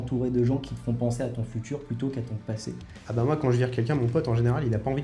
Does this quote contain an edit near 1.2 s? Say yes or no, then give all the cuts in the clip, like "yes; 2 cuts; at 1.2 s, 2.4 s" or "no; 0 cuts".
no; 1 cut; at 3.0 s